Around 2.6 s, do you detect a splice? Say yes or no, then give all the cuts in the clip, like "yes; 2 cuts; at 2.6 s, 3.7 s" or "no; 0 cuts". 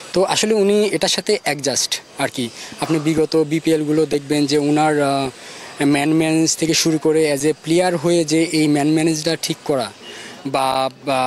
no; 0 cuts